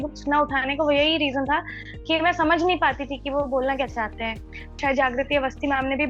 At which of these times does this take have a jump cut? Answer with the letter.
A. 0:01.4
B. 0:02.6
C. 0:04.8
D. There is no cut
C